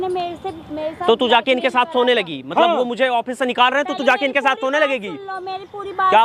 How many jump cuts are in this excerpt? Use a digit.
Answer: 0